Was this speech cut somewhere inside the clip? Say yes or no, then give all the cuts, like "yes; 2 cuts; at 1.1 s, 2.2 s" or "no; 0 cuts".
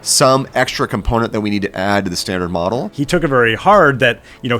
yes; 1 cut; at 2.9 s